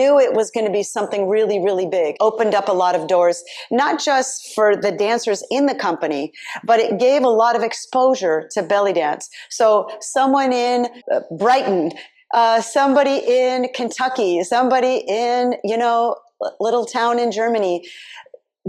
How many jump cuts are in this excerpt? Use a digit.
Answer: 2